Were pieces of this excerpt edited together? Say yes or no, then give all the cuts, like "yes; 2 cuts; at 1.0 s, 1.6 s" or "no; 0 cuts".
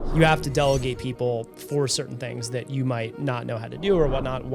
no; 0 cuts